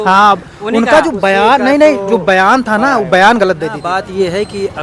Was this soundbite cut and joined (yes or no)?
yes